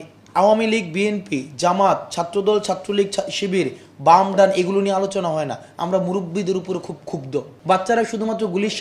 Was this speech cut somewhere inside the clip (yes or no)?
yes